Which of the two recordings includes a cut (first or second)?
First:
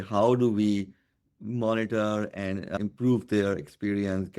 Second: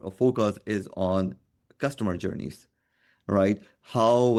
first